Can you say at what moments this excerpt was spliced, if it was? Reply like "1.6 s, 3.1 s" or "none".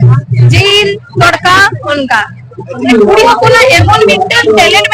2.8 s